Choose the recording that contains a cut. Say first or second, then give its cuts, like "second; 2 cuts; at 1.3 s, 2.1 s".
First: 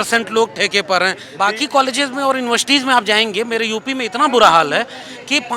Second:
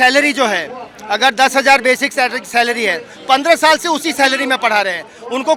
first; 1 cut; at 1.2 s